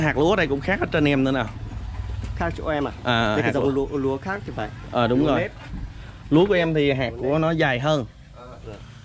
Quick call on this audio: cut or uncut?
uncut